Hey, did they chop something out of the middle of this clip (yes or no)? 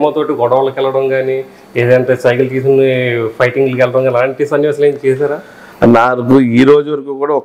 no